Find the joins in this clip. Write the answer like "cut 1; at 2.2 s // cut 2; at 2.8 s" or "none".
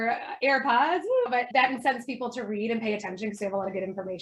none